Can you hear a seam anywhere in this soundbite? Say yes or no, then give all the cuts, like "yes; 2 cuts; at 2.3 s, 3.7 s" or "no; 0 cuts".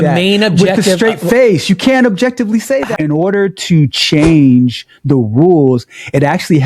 yes; 1 cut; at 2.9 s